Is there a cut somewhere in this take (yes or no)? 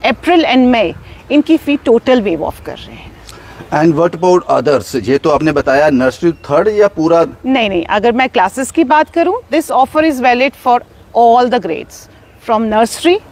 no